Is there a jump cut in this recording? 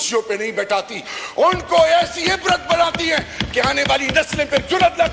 no; 0 cuts

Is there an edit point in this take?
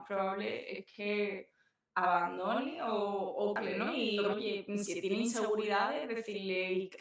yes; 1 cut; at 3.9 s

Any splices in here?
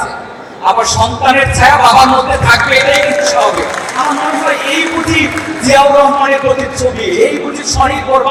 no; 0 cuts

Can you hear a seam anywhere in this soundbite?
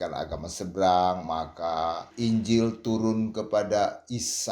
yes; 1 cut; at 2.1 s

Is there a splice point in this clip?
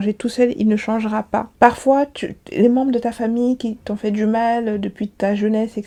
no; 0 cuts

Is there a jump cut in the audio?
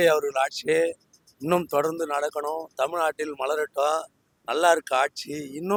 no; 0 cuts

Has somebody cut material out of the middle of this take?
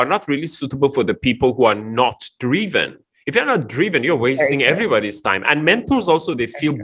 no; 0 cuts

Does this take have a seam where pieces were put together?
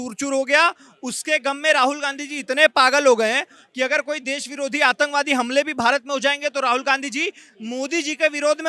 no; 0 cuts

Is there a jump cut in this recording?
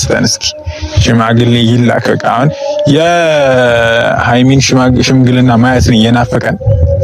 no; 0 cuts

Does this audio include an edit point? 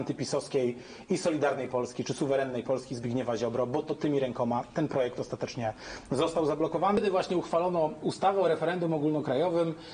yes; 1 cut; at 7.0 s

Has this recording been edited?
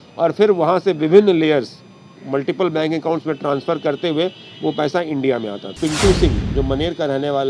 yes; 1 cut; at 5.6 s

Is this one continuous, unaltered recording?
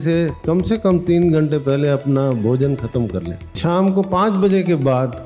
no; 1 cut; at 3.5 s

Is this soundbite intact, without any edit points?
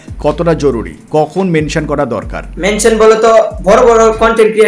yes; 0 cuts

